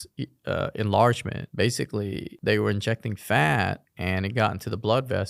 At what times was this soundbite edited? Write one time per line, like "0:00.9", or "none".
0:01.4

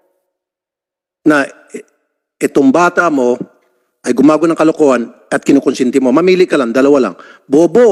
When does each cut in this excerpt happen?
none

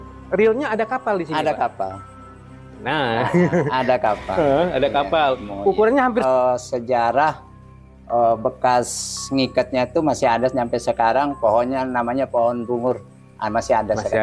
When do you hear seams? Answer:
0:06.2

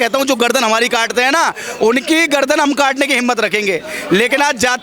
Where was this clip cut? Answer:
none

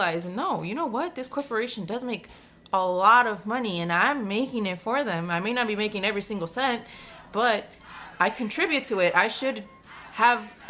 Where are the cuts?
none

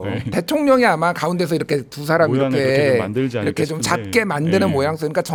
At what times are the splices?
none

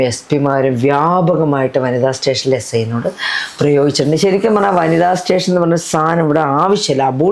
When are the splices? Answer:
none

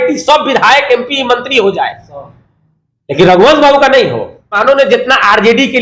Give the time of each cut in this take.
0:04.6

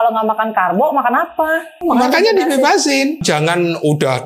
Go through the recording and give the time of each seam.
0:01.7
0:03.2

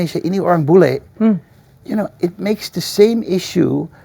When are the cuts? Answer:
none

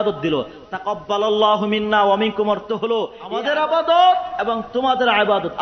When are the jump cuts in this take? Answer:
0:03.2

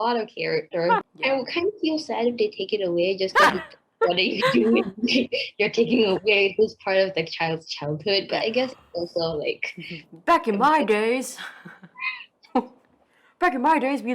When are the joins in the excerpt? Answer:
0:01.0

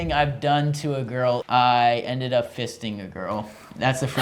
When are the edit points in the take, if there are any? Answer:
0:01.4

